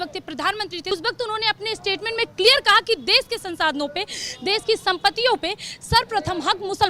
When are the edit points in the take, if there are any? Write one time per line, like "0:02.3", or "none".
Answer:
0:00.9